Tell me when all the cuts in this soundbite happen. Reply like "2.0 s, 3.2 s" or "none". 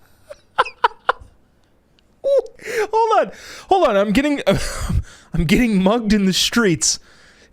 2.6 s